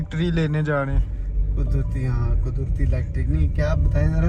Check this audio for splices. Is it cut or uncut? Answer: uncut